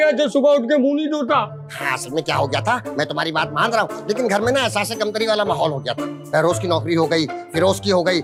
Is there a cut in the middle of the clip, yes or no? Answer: no